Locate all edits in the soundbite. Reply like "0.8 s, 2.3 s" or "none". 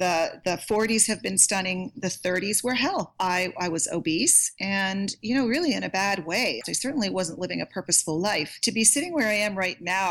4.5 s, 6.6 s, 8.5 s